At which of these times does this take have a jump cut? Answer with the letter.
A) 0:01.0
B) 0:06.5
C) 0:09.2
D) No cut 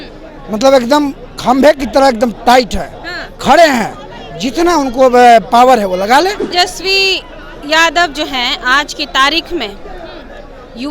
B